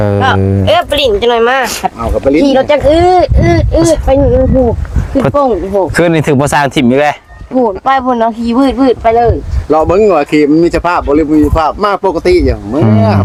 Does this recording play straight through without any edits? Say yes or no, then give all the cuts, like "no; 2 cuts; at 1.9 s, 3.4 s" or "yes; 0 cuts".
yes; 0 cuts